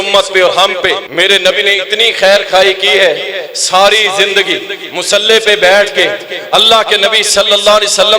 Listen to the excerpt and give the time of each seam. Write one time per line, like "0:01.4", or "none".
0:01.1